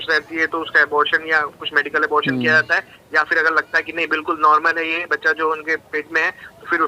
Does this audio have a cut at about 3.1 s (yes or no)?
no